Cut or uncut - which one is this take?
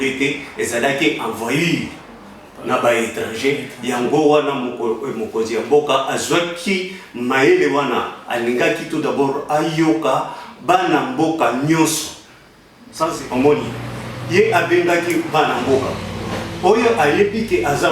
cut